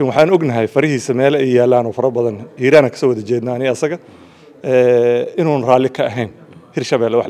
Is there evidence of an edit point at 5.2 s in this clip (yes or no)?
no